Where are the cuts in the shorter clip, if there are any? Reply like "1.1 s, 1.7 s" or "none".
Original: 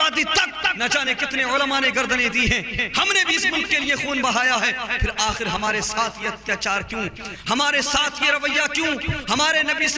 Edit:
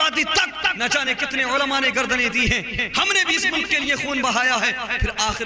none